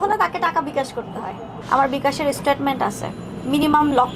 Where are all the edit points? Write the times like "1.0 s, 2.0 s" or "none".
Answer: 1.5 s